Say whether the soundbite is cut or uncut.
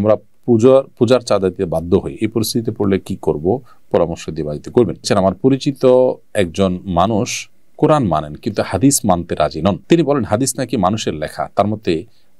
cut